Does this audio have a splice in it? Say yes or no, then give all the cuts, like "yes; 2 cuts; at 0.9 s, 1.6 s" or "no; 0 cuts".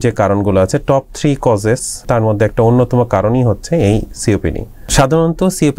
yes; 2 cuts; at 2.0 s, 4.7 s